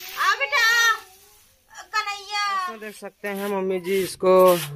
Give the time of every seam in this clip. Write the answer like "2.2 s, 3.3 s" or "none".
3.1 s